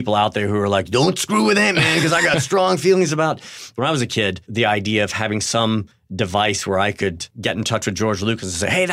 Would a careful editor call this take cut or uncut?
cut